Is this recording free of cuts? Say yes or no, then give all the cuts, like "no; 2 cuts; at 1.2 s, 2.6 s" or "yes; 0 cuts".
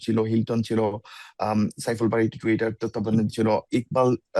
yes; 0 cuts